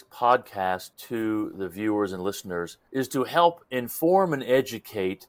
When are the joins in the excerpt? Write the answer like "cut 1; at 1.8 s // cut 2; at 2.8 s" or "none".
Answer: cut 1; at 1.0 s